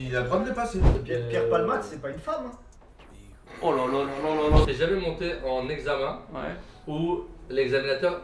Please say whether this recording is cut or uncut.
cut